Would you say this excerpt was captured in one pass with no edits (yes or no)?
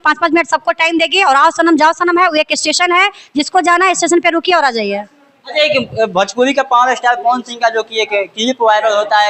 yes